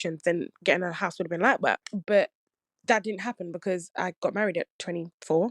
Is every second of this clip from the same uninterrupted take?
no; 1 cut; at 1.9 s

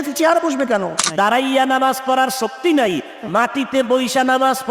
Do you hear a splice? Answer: yes; 1 cut; at 1.0 s

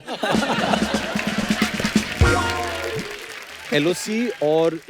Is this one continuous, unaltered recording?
no; 1 cut; at 3.6 s

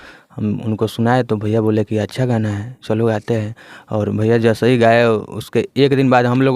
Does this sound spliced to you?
no; 0 cuts

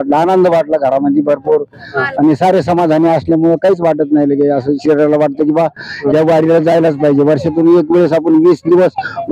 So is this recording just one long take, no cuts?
yes; 0 cuts

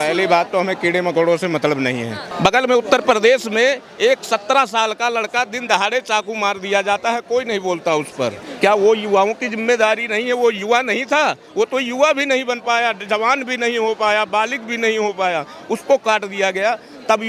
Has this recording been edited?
no; 0 cuts

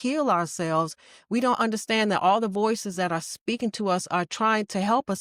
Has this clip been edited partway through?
no; 0 cuts

